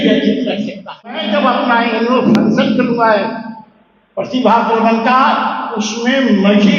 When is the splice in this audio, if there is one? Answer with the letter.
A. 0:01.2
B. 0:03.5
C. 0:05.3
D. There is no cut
A